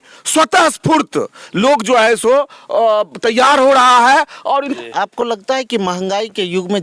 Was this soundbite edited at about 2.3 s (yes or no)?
no